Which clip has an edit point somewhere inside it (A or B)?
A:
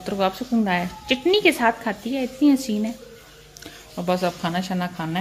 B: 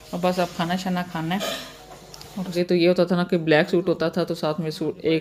B